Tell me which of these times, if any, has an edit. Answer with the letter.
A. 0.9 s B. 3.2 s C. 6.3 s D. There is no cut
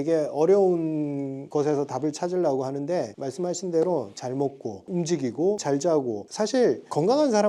B